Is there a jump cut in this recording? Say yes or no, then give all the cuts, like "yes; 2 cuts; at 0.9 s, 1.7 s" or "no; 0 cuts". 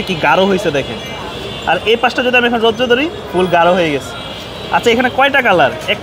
no; 0 cuts